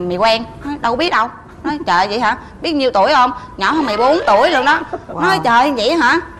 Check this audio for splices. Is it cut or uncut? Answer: uncut